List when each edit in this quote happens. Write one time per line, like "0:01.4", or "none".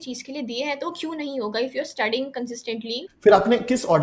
0:03.1